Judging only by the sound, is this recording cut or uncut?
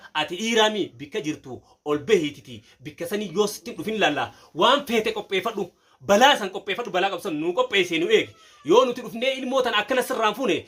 uncut